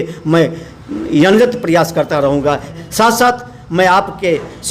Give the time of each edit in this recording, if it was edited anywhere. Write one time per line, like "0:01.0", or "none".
0:02.7